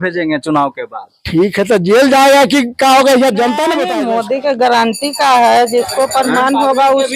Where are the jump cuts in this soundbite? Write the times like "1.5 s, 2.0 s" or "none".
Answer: 3.9 s